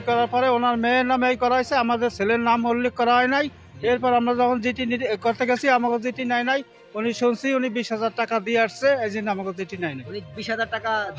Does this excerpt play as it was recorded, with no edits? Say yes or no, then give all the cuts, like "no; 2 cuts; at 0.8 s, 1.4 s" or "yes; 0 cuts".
yes; 0 cuts